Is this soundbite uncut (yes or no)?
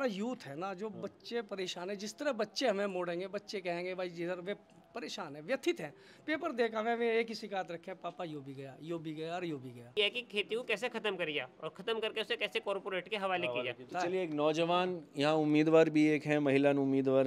no